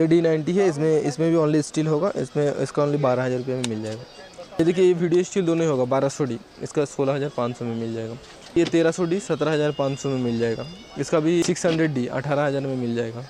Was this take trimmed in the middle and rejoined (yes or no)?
yes